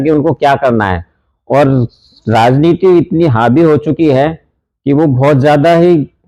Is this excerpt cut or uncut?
uncut